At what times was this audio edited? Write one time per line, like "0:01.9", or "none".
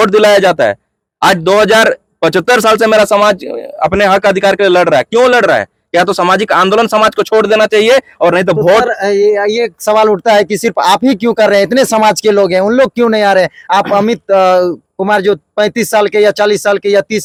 none